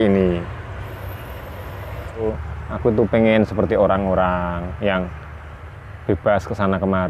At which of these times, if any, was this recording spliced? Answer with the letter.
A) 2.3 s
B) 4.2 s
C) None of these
A